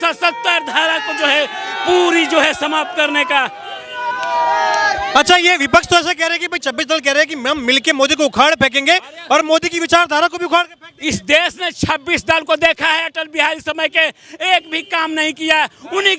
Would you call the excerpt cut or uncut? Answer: uncut